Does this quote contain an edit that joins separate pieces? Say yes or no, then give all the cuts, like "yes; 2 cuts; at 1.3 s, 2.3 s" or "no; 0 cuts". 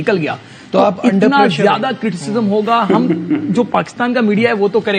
no; 0 cuts